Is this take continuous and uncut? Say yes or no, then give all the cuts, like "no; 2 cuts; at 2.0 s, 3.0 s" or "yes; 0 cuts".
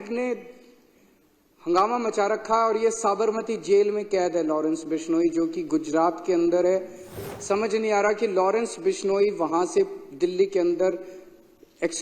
no; 1 cut; at 7.2 s